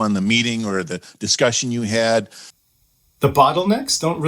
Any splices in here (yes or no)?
yes